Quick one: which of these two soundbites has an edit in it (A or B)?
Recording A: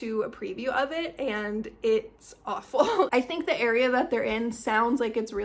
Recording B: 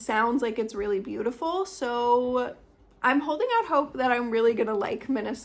A